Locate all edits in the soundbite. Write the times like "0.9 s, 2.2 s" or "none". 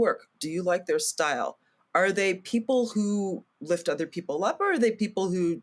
none